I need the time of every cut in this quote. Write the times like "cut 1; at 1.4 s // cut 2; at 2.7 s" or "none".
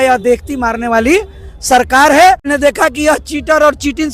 cut 1; at 2.4 s